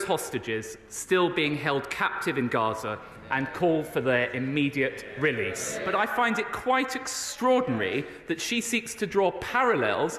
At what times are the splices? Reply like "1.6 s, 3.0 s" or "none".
5.7 s

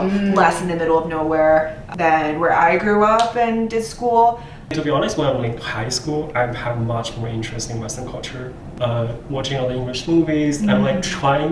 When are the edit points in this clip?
4.5 s

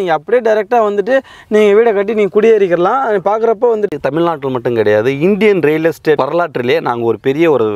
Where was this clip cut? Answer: 3.9 s, 6.2 s

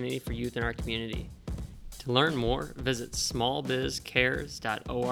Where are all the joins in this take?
1.5 s

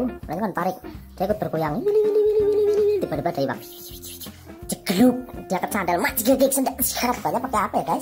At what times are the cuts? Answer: 7.0 s

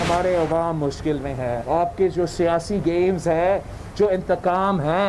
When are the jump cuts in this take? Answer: 1.6 s

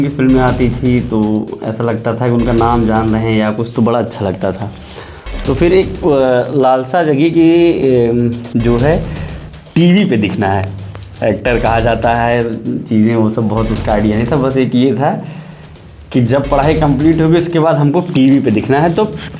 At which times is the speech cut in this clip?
none

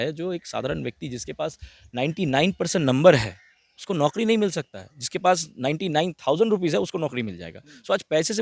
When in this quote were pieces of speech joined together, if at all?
none

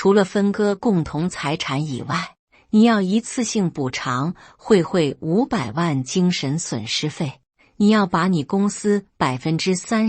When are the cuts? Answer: 7.5 s

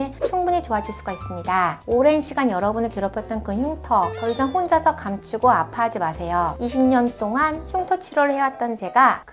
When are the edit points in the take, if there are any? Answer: 6.6 s

